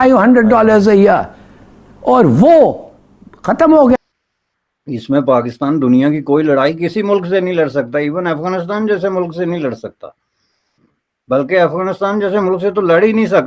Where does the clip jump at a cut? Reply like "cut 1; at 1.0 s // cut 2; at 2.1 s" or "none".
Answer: cut 1; at 4.0 s